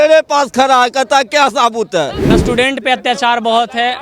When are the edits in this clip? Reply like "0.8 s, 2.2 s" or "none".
2.4 s